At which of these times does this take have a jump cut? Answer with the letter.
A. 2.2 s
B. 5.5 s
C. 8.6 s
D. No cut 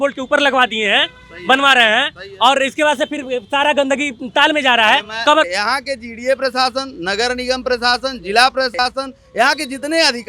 B